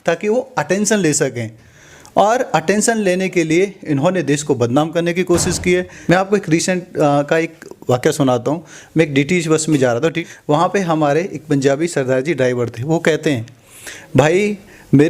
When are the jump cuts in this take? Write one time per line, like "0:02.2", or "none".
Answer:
0:05.9
0:10.3